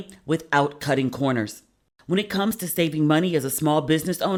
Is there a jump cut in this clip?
no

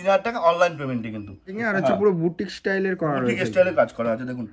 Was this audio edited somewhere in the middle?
yes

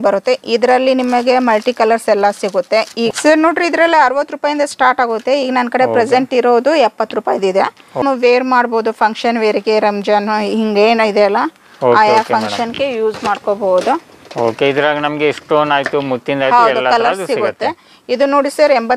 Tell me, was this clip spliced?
yes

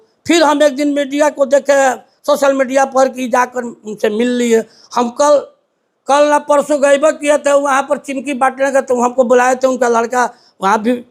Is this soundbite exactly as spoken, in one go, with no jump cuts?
yes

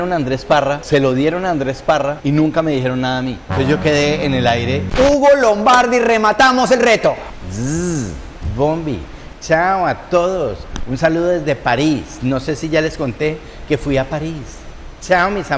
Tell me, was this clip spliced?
yes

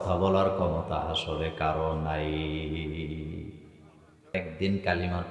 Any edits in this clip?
yes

